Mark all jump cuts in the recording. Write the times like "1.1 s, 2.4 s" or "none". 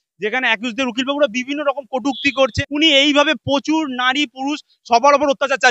2.5 s